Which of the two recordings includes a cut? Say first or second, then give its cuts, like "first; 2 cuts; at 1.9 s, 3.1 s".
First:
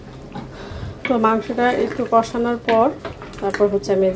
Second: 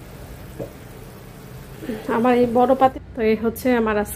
second; 1 cut; at 2.9 s